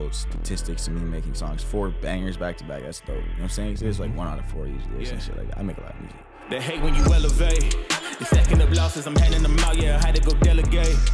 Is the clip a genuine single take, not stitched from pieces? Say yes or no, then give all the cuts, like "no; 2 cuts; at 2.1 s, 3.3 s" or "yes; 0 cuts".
no; 1 cut; at 6.3 s